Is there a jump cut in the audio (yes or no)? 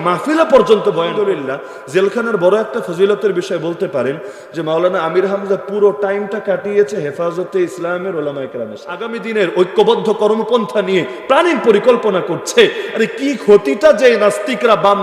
yes